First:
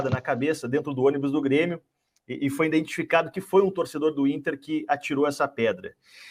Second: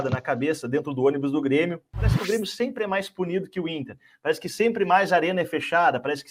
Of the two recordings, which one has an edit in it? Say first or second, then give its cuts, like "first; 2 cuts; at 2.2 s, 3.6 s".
second; 1 cut; at 2.2 s